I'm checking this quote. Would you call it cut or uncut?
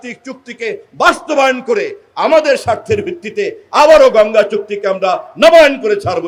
uncut